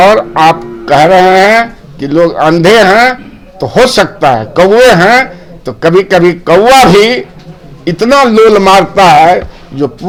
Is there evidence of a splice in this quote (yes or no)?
no